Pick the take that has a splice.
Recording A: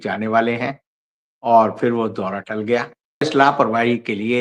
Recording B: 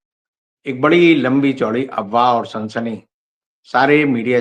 A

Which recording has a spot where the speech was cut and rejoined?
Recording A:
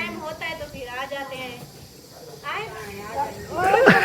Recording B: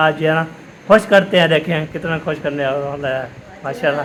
A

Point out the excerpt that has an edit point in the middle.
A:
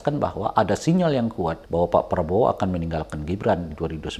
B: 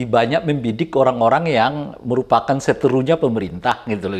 A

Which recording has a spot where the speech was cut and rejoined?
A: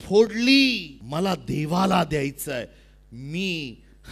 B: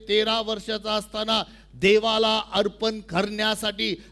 A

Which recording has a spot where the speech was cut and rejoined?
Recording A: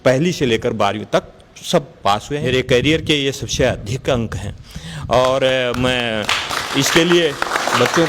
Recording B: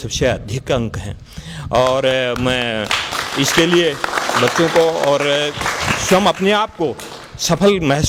A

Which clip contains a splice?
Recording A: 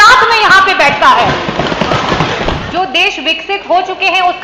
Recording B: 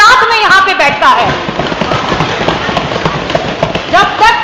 A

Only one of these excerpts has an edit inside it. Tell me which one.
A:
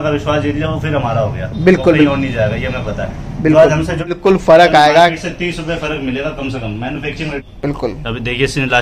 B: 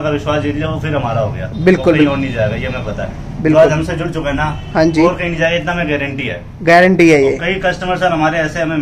A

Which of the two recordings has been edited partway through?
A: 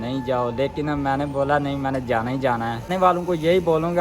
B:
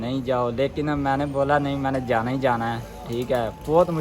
A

